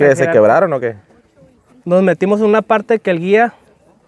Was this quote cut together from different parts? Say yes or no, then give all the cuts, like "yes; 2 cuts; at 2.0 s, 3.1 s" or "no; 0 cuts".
no; 0 cuts